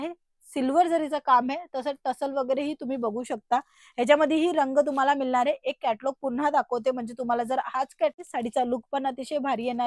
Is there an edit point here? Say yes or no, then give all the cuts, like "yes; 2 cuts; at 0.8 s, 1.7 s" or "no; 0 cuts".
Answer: yes; 1 cut; at 8.2 s